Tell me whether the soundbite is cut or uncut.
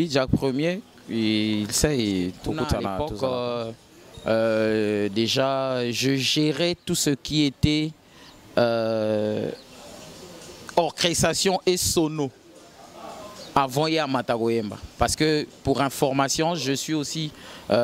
cut